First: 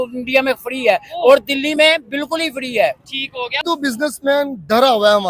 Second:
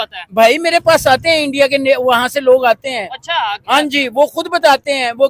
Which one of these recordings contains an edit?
first; 1 cut; at 3.6 s

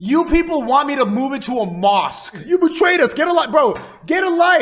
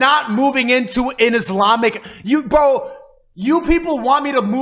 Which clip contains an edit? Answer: first; 1 cut; at 2.3 s

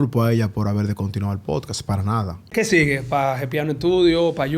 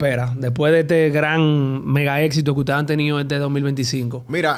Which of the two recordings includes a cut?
first; 1 cut; at 2.5 s

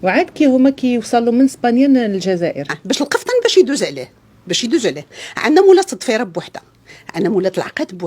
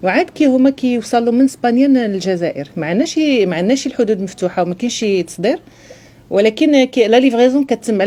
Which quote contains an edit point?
first; 1 cut; at 2.8 s

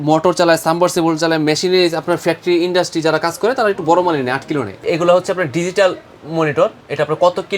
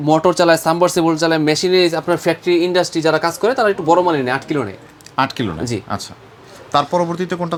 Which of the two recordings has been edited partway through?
first; 1 cut; at 4.7 s

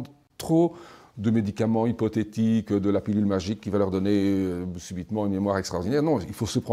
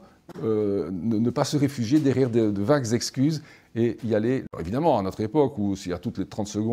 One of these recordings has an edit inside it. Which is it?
second; 1 cut; at 4.5 s

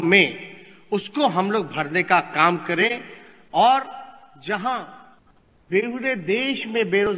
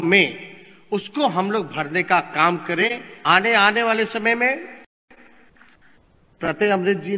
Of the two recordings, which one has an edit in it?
second; 1 cut; at 3.1 s

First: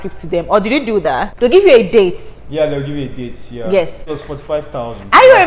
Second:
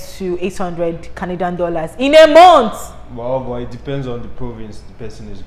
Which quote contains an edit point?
first; 2 cuts; at 1.3 s, 4.1 s

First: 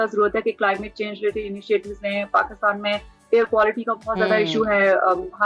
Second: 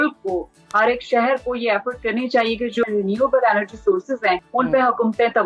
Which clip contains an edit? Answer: second; 2 cuts; at 2.8 s, 4.5 s

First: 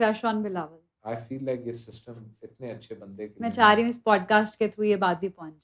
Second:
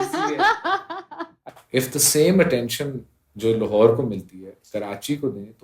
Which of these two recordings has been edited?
second; 1 cut; at 1.5 s

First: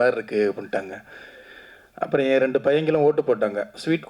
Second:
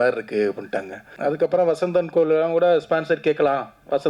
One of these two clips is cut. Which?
second; 1 cut; at 1.1 s

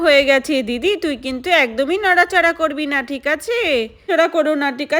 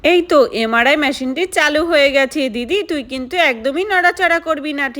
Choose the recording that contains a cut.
first; 1 cut; at 4.1 s

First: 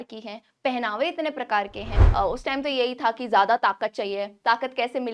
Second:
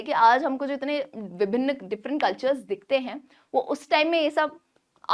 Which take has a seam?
first; 1 cut; at 2.0 s

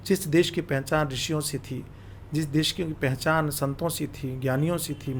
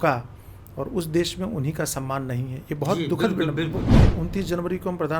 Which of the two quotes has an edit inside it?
second; 1 cut; at 4.0 s

